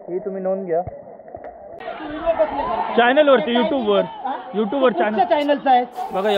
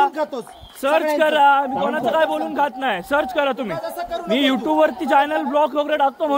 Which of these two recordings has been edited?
first; 1 cut; at 1.8 s

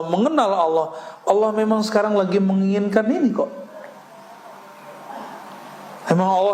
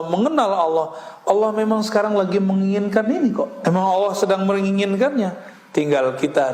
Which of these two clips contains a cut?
second; 1 cut; at 3.5 s

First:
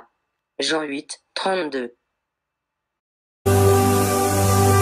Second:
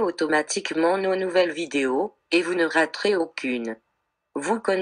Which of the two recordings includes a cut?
first; 1 cut; at 3.5 s

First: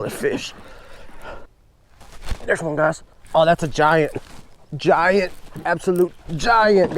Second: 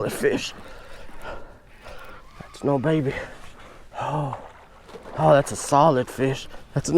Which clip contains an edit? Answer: first; 1 cut; at 1.6 s

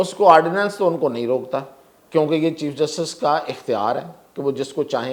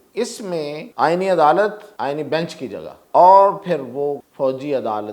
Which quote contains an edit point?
second; 4 cuts; at 0.9 s, 1.8 s, 3.0 s, 4.2 s

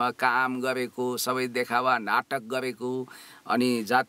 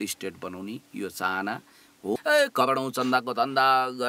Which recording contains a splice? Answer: second; 1 cut; at 2.1 s

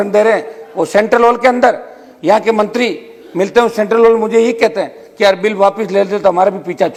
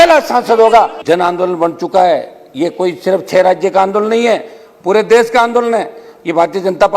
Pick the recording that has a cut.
second; 1 cut; at 1.0 s

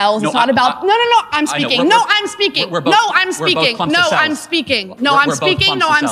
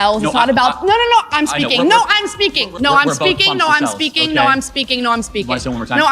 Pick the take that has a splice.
second; 1 cut; at 2.6 s

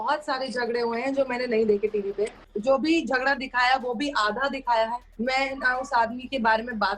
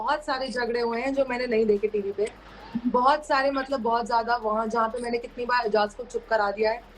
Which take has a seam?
first; 2 cuts; at 2.5 s, 5.1 s

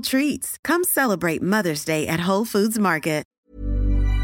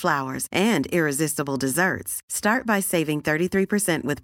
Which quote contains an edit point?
first; 1 cut; at 3.3 s

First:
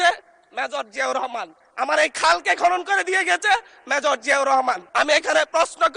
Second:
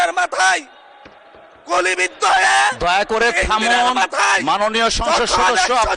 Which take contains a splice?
first; 1 cut; at 4.8 s

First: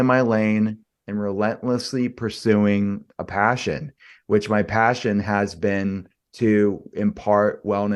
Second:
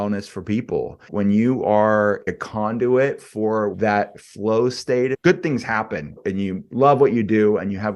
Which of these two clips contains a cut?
second; 5 cuts; at 1.1 s, 2.4 s, 3.7 s, 5.2 s, 6.1 s

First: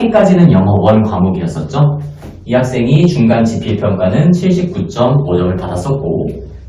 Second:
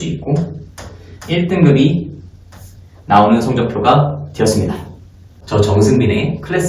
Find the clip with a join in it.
second; 1 cut; at 5.3 s

